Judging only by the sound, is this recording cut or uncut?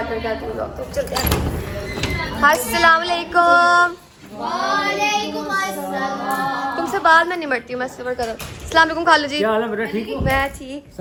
uncut